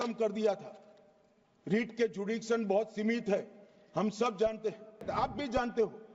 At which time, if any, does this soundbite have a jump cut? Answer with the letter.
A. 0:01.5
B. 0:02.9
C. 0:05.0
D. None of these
C